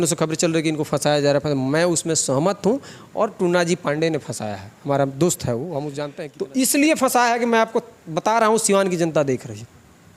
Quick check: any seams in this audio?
yes; 1 cut; at 6.0 s

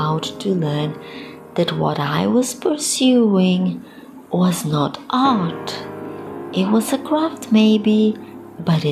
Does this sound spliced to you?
no; 0 cuts

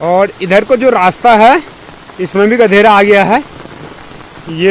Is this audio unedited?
yes; 0 cuts

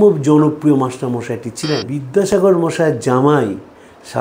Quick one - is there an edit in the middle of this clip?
yes; 1 cut; at 2.0 s

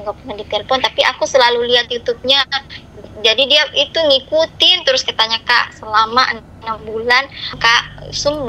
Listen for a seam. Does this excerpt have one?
yes; 1 cut; at 7.5 s

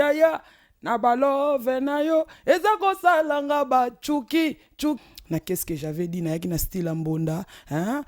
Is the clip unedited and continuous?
no; 1 cut; at 5.0 s

